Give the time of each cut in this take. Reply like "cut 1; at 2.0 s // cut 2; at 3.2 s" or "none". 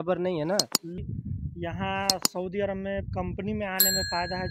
cut 1; at 1.0 s